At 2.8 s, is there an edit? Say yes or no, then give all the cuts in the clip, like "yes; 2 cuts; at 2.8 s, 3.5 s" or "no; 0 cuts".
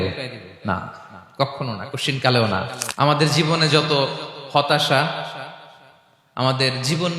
yes; 1 cut; at 2.8 s